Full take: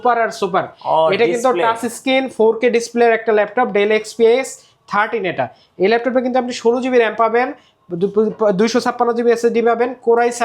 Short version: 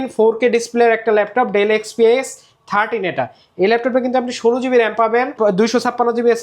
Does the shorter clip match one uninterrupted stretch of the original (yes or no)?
no